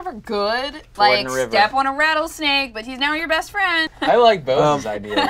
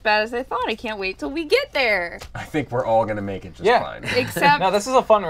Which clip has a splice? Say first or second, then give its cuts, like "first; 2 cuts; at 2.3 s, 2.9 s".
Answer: first; 2 cuts; at 0.8 s, 3.8 s